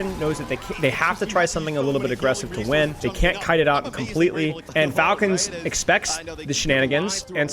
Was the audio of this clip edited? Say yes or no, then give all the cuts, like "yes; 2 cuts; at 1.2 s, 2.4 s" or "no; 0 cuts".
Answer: yes; 2 cuts; at 3.0 s, 4.6 s